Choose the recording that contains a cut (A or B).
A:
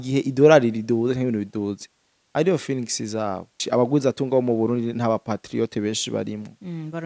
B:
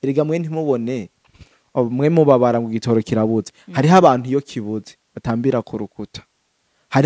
A